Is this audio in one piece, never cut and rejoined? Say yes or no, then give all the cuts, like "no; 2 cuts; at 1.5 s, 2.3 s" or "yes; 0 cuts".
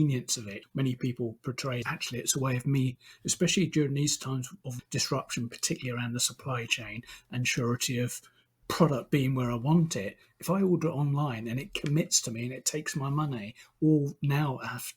no; 1 cut; at 1.8 s